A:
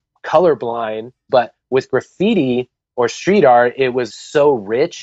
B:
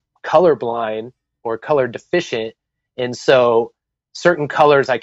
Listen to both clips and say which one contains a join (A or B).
A